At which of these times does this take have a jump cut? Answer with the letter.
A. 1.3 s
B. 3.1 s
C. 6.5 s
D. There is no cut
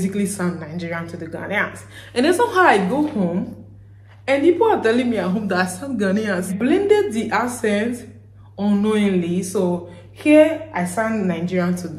C